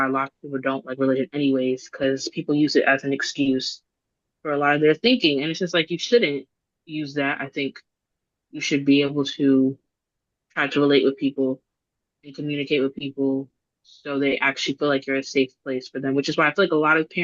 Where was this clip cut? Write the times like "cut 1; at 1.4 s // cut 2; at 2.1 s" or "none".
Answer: none